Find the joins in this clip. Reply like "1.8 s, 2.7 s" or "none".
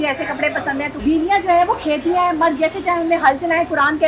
1.0 s